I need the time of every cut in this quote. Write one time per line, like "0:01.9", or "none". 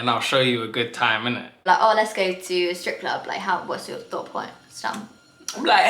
0:01.7